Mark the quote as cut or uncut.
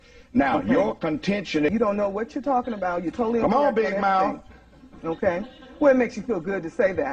cut